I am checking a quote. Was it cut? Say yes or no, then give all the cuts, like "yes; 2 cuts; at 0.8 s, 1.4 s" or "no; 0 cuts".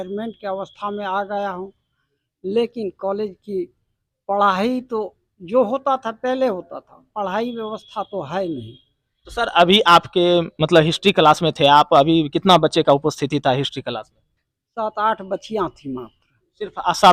no; 0 cuts